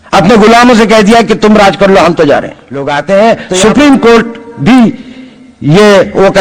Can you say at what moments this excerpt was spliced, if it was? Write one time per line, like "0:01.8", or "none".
0:02.9